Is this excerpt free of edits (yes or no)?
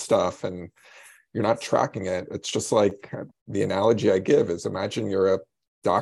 yes